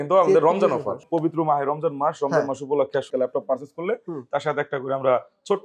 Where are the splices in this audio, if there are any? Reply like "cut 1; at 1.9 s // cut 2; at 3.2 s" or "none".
cut 1; at 1.0 s // cut 2; at 3.1 s

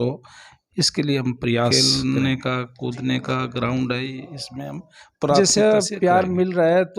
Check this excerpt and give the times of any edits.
cut 1; at 1.7 s // cut 2; at 5.4 s

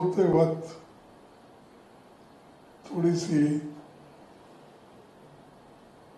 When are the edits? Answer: none

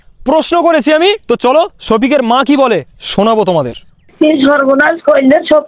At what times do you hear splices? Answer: cut 1; at 1.2 s // cut 2; at 4.1 s

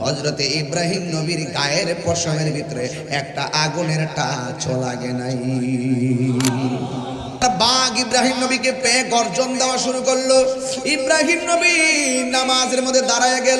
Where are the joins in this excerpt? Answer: cut 1; at 7.4 s

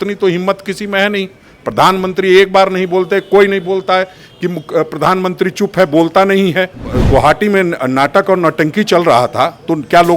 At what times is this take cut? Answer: cut 1; at 6.9 s

